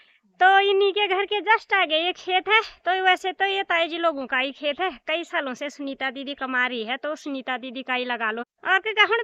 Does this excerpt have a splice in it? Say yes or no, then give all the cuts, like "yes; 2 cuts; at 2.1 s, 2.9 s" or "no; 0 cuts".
no; 0 cuts